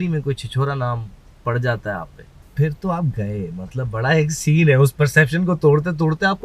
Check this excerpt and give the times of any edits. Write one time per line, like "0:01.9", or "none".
0:02.4